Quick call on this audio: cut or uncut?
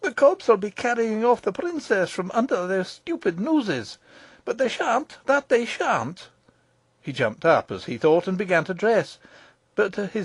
uncut